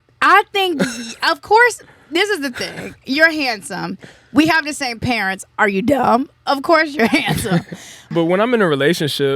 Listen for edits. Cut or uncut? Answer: cut